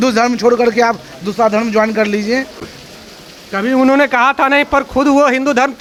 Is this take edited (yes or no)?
no